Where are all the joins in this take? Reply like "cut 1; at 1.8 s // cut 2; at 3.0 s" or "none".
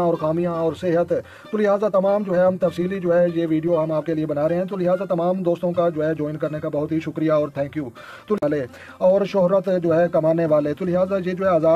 cut 1; at 8.4 s